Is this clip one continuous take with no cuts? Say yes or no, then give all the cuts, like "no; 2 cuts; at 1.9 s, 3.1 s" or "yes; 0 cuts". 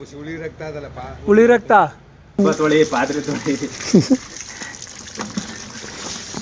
no; 1 cut; at 2.4 s